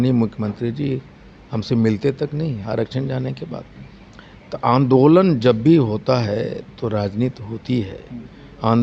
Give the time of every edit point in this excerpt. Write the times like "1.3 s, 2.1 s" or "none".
none